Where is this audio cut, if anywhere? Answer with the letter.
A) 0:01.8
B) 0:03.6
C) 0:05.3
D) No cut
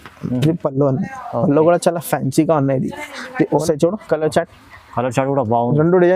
B